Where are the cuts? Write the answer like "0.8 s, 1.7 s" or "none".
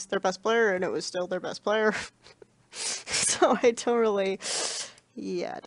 3.7 s